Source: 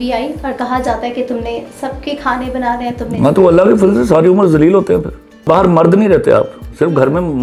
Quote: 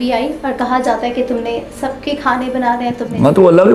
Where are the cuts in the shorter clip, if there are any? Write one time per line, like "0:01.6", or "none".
none